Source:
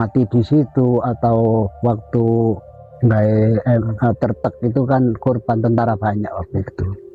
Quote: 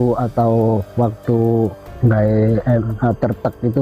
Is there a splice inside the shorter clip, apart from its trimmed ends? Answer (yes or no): yes